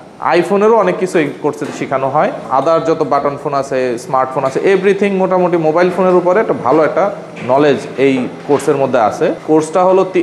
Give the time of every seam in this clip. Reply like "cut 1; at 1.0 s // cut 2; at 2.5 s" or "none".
cut 1; at 2.4 s // cut 2; at 9.4 s